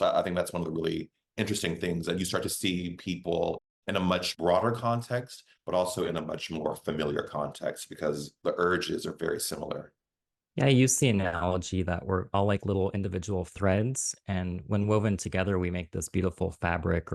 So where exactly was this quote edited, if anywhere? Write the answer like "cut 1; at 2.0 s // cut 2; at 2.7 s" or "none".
none